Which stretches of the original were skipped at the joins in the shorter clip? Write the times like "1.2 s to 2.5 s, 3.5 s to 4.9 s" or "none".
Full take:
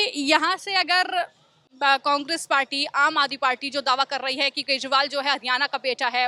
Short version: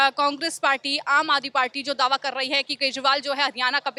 none